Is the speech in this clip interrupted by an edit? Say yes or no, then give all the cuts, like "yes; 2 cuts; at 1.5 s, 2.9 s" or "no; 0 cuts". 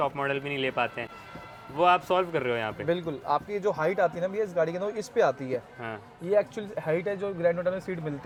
no; 0 cuts